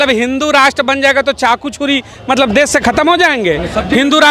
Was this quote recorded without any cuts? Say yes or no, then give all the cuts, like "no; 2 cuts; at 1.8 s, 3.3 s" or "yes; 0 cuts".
yes; 0 cuts